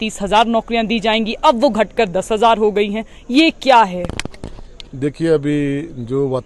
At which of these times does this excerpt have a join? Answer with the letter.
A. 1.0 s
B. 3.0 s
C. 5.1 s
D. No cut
D